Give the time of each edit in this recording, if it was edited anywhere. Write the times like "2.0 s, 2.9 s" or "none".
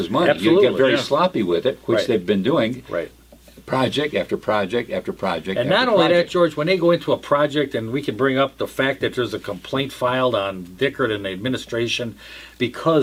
none